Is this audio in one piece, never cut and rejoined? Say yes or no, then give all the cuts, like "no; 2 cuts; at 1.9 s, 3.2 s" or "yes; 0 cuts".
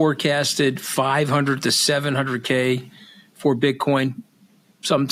yes; 0 cuts